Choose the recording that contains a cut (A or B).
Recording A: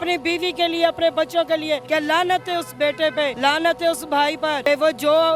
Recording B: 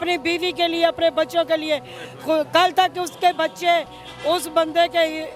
A